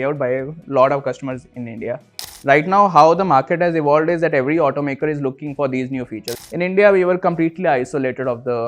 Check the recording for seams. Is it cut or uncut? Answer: cut